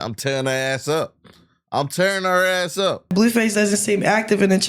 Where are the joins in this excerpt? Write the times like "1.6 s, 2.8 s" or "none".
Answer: 3.1 s